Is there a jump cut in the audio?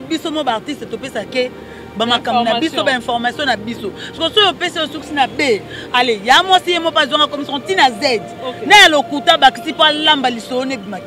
no; 0 cuts

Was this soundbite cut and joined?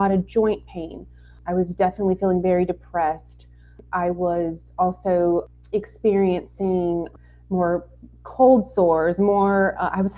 yes; 4 cuts; at 1.4 s, 3.8 s, 5.6 s, 7.2 s

